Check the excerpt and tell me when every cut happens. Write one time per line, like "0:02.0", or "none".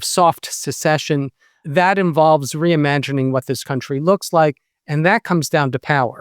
0:01.6